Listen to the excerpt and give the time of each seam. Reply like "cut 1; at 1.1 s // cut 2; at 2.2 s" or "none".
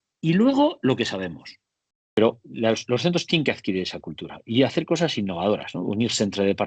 cut 1; at 1.9 s